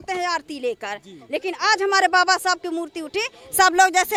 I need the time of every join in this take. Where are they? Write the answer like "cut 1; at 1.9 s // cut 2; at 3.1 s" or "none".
none